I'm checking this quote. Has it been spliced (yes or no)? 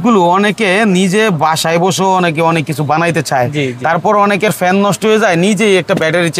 no